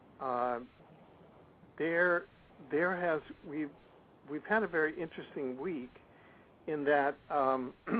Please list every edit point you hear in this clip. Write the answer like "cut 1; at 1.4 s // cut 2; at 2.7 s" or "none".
cut 1; at 3.6 s

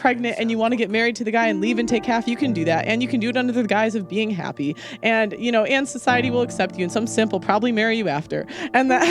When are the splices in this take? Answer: cut 1; at 4.8 s

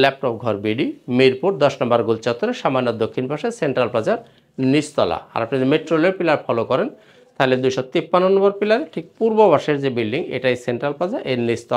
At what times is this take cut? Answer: none

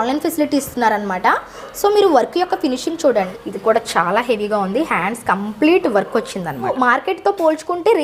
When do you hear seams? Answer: cut 1; at 3.3 s // cut 2; at 6.7 s

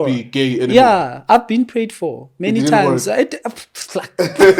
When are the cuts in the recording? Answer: none

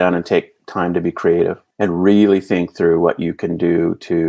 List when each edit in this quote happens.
cut 1; at 1.6 s

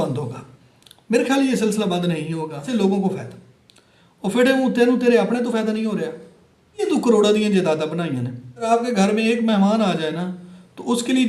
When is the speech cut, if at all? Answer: cut 1; at 2.7 s // cut 2; at 6.8 s // cut 3; at 8.7 s

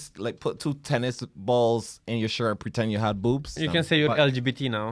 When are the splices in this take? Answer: cut 1; at 3.5 s

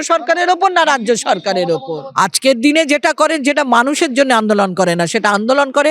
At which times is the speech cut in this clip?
cut 1; at 2.0 s

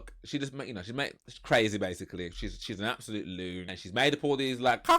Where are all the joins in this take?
cut 1; at 3.7 s

